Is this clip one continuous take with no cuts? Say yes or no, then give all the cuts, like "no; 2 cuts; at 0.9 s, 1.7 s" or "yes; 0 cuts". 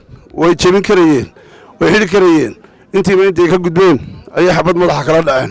yes; 0 cuts